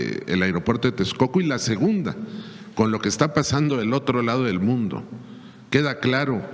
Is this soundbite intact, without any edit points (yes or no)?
yes